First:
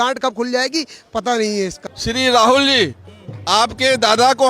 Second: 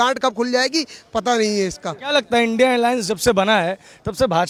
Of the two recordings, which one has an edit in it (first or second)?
first